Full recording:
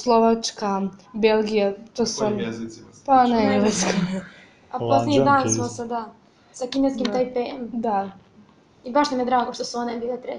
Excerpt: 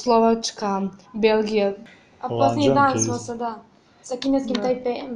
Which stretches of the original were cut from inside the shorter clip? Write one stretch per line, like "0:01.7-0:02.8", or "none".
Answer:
0:01.8-0:04.3

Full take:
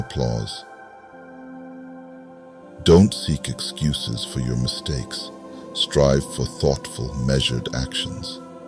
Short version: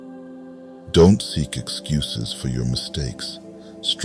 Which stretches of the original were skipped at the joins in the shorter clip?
0:02.4-0:02.8

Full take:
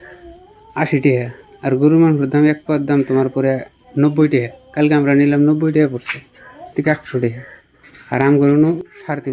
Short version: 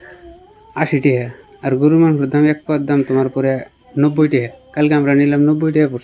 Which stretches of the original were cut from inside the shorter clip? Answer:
none

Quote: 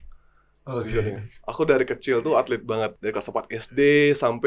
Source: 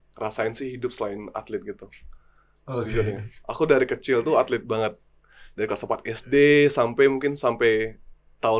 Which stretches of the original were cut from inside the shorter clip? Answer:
0:05.0-0:05.5

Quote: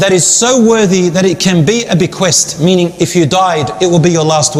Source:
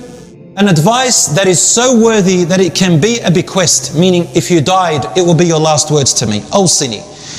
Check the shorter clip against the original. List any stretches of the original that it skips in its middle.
none

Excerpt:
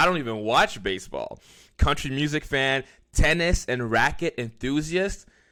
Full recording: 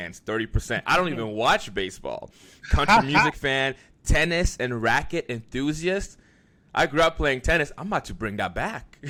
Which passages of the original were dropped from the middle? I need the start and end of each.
none

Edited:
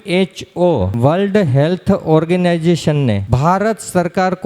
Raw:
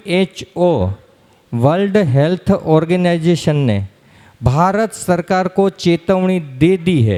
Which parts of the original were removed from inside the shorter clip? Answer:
0:00.9-0:01.5
0:03.9-0:04.4

